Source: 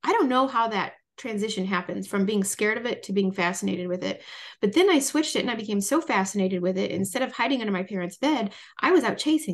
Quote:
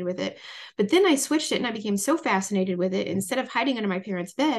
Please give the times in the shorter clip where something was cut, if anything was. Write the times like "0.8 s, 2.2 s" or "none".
none

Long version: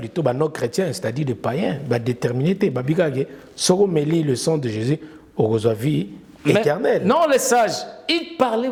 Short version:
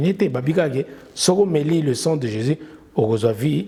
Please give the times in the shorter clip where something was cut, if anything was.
none

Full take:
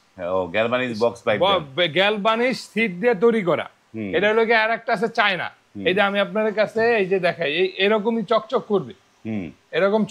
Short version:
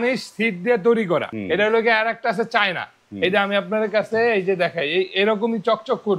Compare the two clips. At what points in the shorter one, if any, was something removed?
1.3 s

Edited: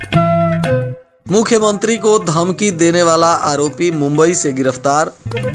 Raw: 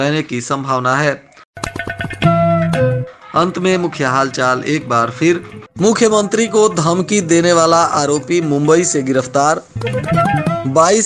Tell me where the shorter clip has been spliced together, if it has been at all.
1.1 s

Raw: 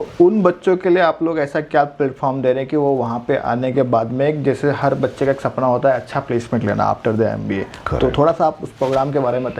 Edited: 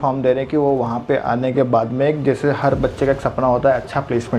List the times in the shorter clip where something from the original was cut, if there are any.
none

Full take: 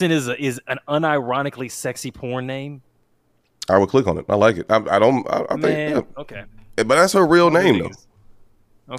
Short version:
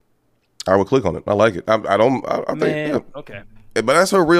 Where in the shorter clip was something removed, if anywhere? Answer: none

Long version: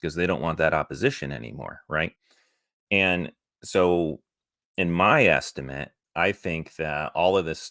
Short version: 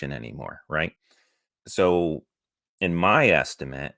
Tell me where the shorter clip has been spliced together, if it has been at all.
1.5 s

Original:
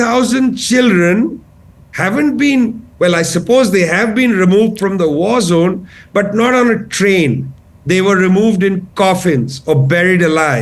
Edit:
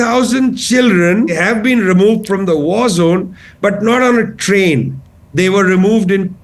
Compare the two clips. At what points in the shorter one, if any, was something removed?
1.4 s

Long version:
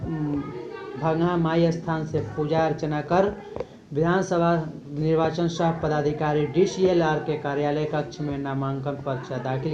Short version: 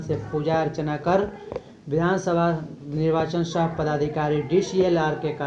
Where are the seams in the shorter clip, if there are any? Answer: none

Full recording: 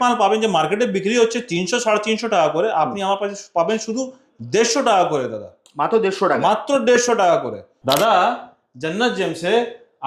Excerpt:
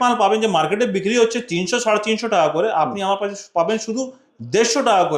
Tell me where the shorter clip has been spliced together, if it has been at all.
none

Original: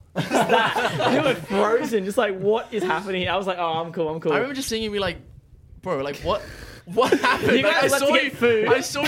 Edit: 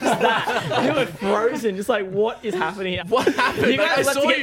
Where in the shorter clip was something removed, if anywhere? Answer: 3.0 s

